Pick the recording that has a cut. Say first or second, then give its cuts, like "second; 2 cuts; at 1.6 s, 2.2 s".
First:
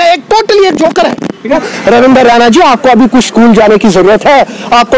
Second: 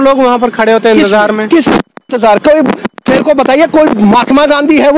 first; 1 cut; at 1.5 s